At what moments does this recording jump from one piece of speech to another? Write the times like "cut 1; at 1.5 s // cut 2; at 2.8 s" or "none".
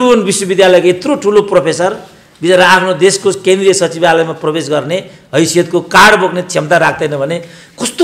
none